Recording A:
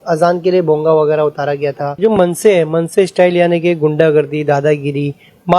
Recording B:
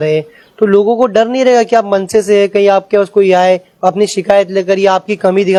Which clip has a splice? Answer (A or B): A